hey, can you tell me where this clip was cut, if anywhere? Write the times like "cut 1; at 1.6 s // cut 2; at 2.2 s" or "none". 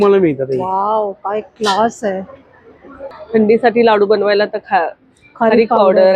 cut 1; at 3.1 s